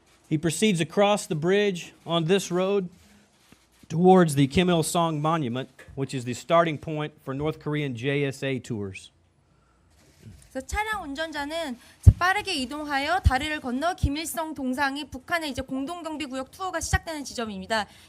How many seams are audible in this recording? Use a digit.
1